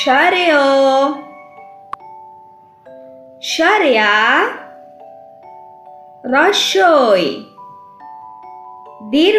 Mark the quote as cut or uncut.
cut